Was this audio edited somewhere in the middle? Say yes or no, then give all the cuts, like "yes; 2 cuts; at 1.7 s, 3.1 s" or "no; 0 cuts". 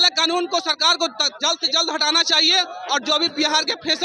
no; 0 cuts